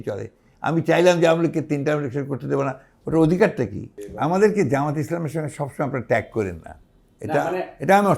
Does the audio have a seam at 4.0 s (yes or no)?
yes